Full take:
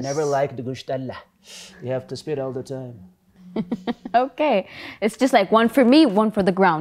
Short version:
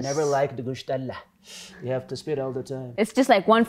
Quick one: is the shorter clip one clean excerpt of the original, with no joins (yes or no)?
no